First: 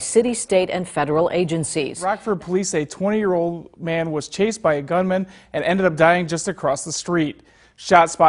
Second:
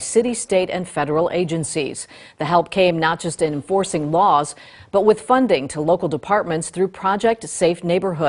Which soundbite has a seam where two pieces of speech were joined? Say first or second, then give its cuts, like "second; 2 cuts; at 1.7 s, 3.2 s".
first; 1 cut; at 2.0 s